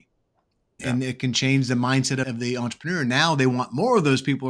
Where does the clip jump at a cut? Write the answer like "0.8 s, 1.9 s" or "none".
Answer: none